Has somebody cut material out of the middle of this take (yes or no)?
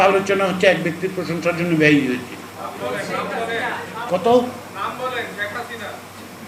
no